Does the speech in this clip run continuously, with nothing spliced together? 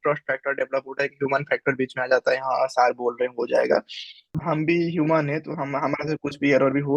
no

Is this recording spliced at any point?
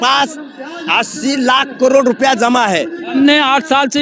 yes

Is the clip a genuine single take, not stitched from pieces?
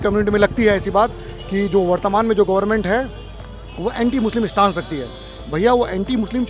yes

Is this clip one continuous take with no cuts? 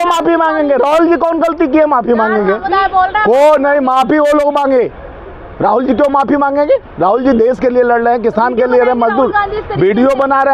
yes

